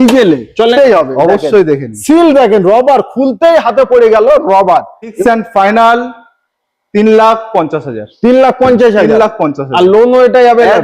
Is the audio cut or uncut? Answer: cut